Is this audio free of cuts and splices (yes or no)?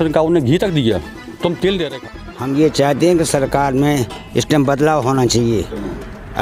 no